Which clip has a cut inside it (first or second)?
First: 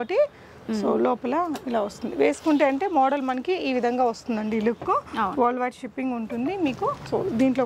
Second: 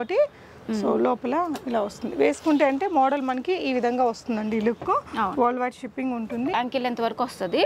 second